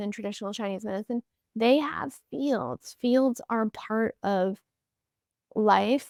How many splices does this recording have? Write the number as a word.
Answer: zero